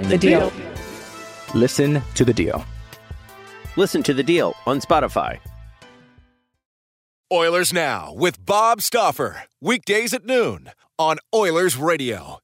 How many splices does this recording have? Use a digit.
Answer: 1